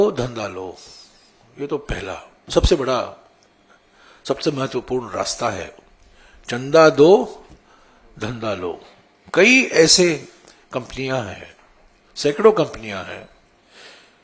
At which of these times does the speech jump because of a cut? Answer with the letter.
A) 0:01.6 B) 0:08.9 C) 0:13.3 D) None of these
D